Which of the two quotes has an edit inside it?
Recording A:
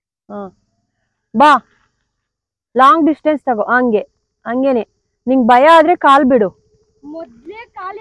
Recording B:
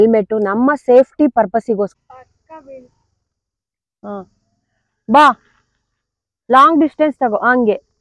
B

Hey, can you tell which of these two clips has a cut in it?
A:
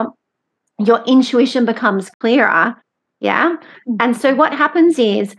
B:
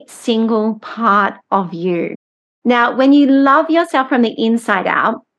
A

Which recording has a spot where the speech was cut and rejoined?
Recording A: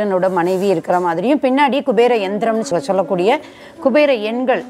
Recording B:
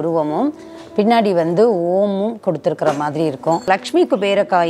B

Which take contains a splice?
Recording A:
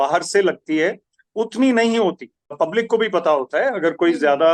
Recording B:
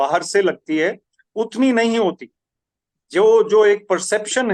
A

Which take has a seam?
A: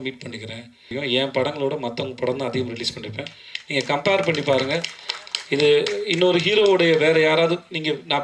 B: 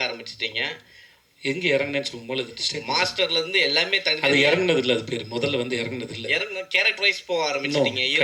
A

